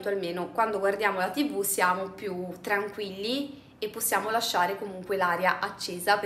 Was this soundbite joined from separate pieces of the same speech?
no; 0 cuts

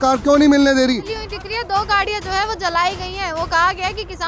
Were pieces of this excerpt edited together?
yes; 1 cut; at 1.2 s

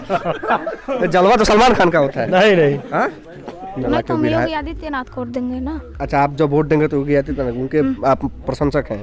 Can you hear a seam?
yes; 1 cut; at 3.8 s

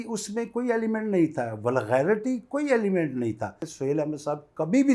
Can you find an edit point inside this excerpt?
yes; 1 cut; at 3.7 s

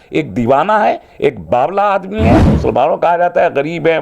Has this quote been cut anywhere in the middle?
yes; 1 cut; at 2.5 s

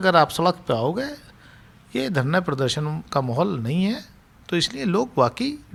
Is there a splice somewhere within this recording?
no; 0 cuts

